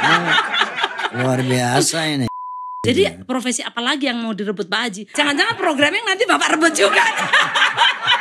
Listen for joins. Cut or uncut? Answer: cut